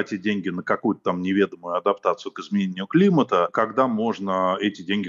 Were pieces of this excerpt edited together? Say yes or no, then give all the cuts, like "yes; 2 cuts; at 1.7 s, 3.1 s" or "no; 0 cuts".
no; 0 cuts